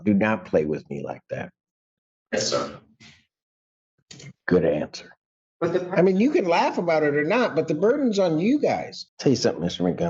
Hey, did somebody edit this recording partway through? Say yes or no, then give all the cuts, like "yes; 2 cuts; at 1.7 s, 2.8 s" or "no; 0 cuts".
yes; 2 cuts; at 5.5 s, 8.9 s